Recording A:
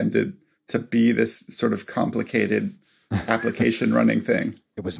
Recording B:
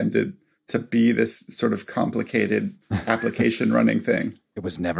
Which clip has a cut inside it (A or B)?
B